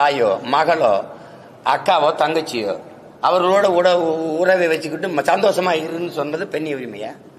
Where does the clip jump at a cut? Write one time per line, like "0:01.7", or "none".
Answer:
none

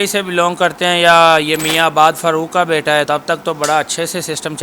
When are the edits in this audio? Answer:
0:03.1

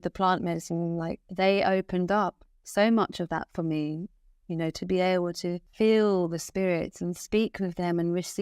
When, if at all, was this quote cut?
0:01.2
0:05.6

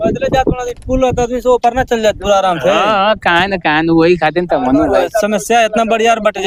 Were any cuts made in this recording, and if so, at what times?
none

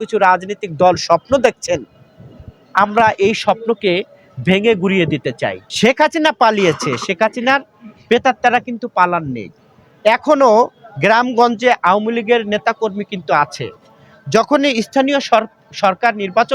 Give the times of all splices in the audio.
0:05.6

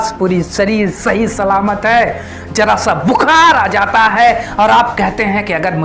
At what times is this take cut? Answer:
none

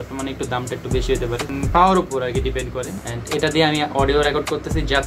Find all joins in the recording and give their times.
0:01.5
0:03.1

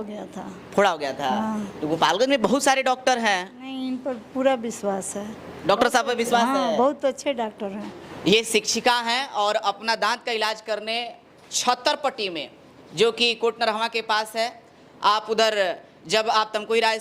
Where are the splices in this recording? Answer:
none

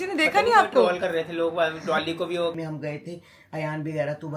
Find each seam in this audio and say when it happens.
0:02.5

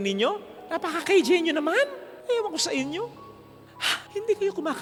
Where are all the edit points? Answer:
none

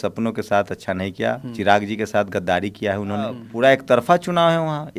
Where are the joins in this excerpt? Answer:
0:03.5

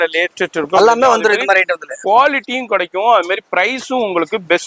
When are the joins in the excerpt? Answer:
none

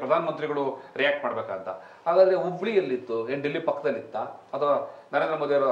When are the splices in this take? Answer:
none

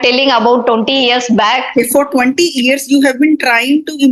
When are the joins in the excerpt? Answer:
0:01.7

